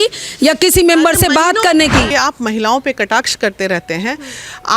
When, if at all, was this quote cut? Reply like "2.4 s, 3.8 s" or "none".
2.1 s